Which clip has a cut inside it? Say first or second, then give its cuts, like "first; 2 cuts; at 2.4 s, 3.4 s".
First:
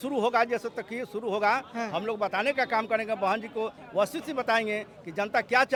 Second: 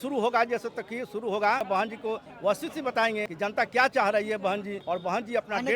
second; 3 cuts; at 1.6 s, 3.3 s, 4.8 s